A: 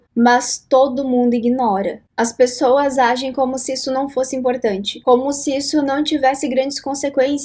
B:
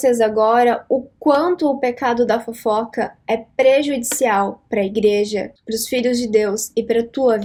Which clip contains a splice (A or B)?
A